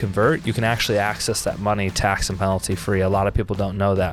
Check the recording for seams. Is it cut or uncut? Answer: uncut